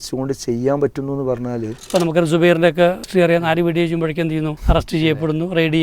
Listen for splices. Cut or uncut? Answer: cut